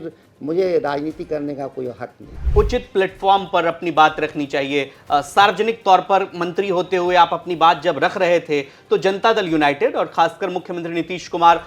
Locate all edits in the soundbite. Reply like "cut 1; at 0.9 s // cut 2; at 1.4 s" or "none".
cut 1; at 2.4 s